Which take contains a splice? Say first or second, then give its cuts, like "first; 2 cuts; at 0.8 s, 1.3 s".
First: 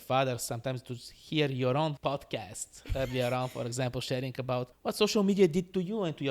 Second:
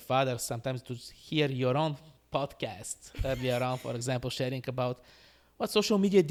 first; 2 cuts; at 2.0 s, 4.7 s